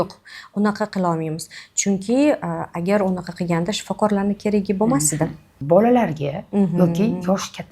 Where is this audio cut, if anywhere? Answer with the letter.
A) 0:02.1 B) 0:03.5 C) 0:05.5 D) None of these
C